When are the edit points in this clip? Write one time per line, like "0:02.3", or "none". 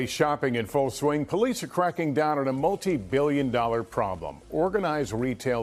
none